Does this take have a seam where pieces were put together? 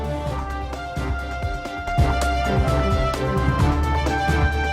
yes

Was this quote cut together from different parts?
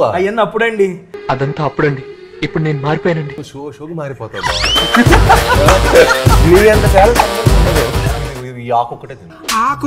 yes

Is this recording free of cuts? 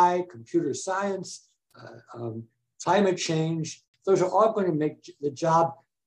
no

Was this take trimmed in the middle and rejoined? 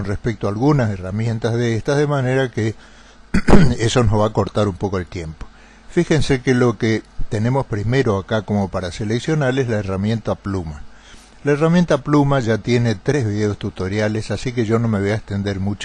yes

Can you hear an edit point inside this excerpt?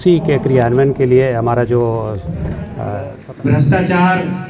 yes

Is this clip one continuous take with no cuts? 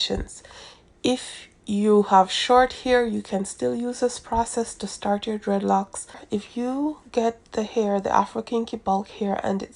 no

